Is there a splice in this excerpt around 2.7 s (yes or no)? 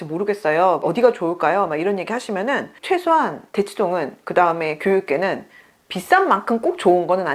yes